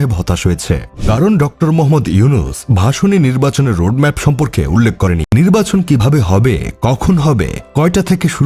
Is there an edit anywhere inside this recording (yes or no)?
yes